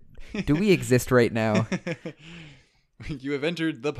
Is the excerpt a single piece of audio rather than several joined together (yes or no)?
yes